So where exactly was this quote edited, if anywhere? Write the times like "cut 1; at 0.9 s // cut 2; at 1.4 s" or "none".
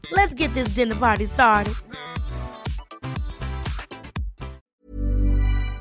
cut 1; at 4.7 s